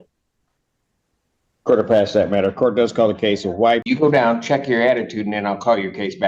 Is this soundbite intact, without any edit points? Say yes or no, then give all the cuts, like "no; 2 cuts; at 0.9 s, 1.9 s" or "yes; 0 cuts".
no; 1 cut; at 3.8 s